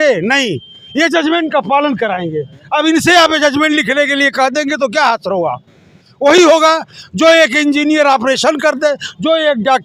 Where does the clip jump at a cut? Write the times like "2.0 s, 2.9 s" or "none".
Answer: none